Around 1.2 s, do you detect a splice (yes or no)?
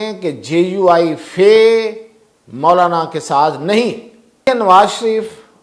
no